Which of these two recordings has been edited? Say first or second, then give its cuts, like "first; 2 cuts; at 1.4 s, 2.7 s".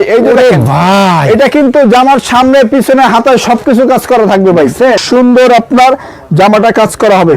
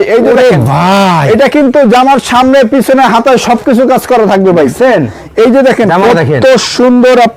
first; 1 cut; at 5.0 s